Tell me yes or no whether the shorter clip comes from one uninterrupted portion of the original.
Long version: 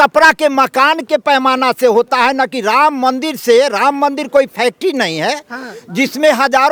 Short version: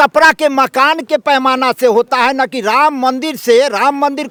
yes